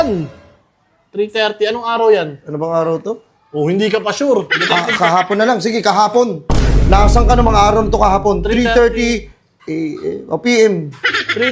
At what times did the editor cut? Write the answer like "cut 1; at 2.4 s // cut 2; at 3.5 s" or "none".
none